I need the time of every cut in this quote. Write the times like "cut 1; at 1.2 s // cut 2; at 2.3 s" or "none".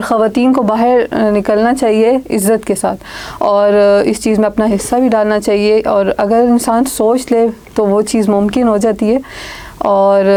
none